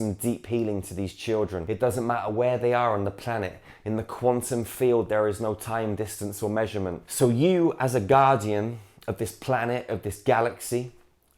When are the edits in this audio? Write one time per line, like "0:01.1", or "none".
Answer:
0:01.6
0:07.0